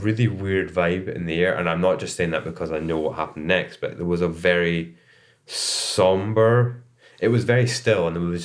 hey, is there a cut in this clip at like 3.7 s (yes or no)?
no